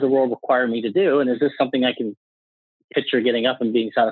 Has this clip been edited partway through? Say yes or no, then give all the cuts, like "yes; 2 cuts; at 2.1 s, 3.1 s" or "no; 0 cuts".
no; 0 cuts